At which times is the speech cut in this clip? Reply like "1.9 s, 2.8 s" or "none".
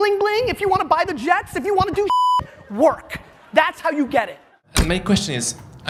none